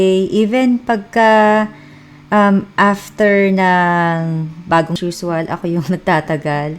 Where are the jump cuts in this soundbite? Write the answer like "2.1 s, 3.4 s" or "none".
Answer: 5.0 s